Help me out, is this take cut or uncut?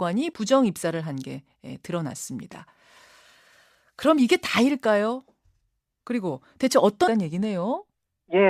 uncut